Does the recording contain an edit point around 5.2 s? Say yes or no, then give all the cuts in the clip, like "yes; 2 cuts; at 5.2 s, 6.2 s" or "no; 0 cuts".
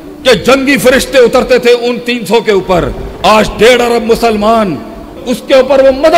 yes; 1 cut; at 5.2 s